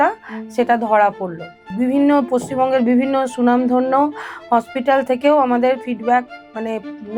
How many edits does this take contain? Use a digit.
1